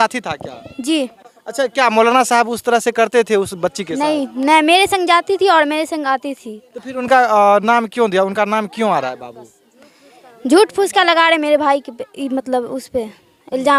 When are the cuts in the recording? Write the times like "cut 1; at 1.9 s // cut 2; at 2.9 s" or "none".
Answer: none